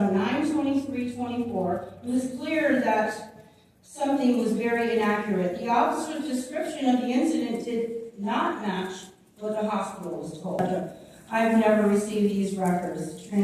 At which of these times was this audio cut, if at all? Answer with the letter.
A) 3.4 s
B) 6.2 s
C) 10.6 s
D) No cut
C